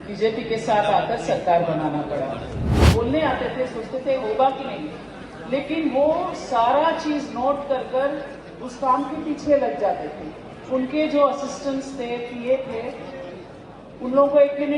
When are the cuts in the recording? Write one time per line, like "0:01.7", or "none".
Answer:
0:02.7